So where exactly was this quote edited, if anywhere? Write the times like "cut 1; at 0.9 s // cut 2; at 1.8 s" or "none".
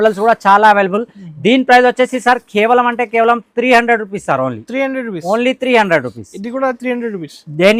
none

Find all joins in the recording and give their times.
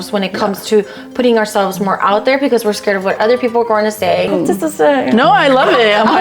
cut 1; at 4.3 s

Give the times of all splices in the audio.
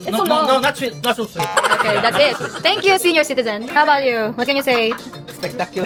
none

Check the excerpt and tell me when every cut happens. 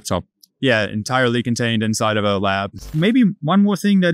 cut 1; at 3.0 s

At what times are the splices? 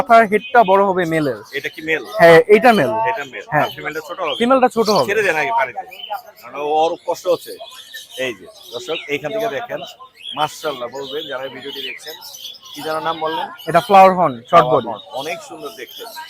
none

